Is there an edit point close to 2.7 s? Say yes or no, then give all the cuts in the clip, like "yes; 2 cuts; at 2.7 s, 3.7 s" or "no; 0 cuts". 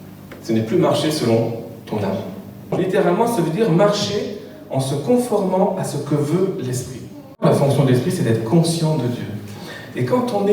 yes; 2 cuts; at 2.7 s, 7.4 s